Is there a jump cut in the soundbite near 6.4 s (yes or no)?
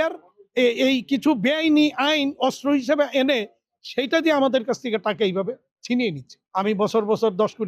yes